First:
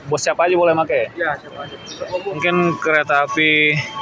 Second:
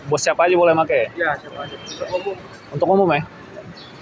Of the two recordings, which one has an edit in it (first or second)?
first